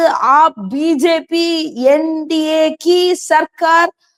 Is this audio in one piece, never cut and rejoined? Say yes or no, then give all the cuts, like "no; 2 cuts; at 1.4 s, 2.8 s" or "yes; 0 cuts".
yes; 0 cuts